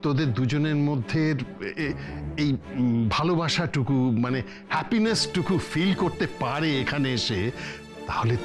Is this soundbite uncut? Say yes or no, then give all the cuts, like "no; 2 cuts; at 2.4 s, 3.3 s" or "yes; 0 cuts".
yes; 0 cuts